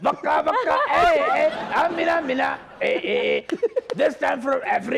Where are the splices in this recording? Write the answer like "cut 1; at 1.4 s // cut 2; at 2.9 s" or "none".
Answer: none